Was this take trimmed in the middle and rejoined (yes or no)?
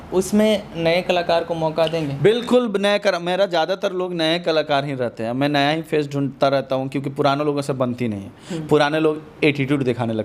no